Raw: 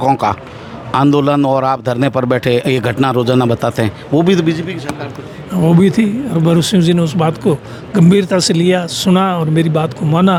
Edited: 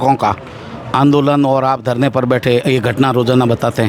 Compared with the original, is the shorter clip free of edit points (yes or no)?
yes